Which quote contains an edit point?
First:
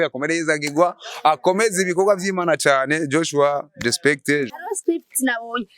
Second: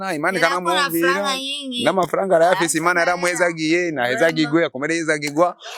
first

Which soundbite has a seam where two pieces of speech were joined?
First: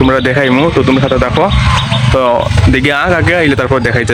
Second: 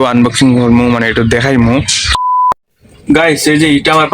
second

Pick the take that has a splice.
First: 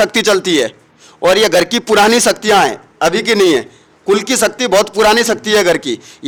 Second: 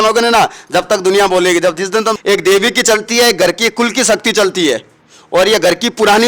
second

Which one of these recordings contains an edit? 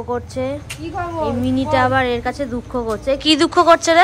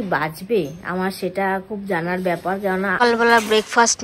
second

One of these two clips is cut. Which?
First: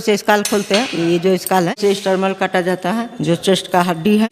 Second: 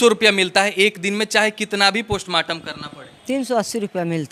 first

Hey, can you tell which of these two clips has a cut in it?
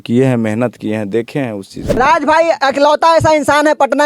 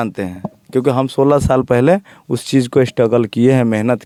first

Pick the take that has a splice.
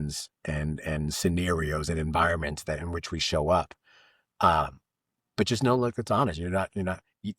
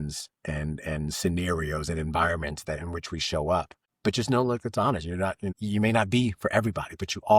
second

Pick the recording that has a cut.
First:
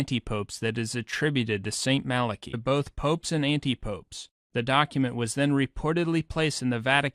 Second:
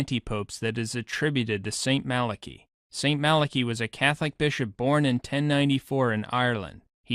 second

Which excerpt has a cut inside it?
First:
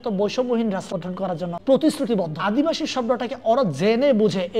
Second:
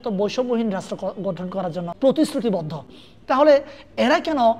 first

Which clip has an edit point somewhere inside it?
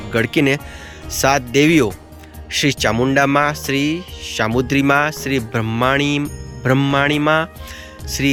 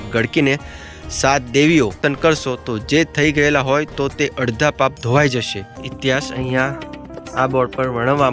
second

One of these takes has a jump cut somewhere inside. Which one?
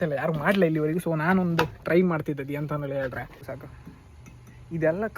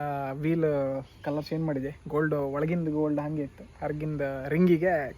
first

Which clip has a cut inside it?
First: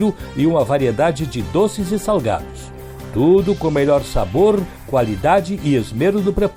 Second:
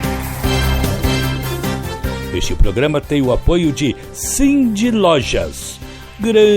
second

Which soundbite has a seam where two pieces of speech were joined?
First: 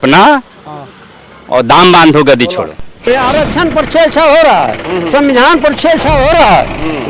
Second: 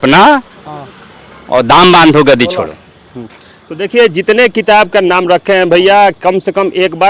first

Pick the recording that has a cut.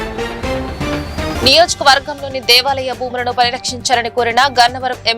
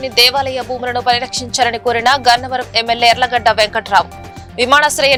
first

